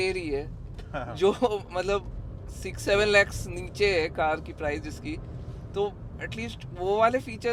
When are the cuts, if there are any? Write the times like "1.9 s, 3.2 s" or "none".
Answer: none